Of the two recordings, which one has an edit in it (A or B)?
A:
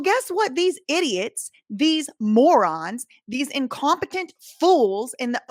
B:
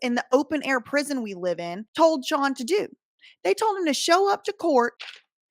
B